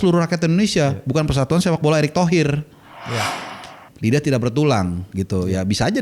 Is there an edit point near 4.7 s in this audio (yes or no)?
no